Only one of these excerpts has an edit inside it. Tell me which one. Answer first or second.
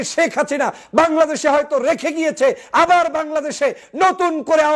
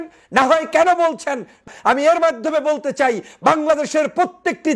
second